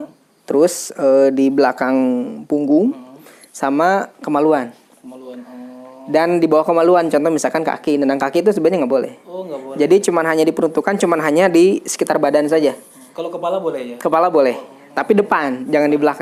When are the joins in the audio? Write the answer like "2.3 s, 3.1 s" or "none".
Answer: none